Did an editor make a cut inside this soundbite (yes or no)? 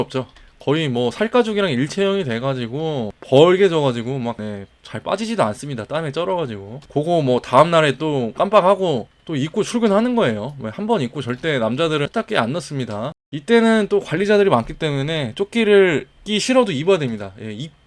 no